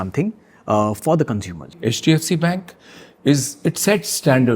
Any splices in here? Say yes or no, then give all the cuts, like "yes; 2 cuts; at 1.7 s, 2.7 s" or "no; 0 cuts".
yes; 1 cut; at 1.7 s